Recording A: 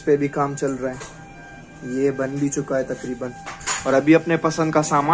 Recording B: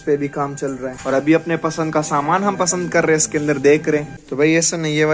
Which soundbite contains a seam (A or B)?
B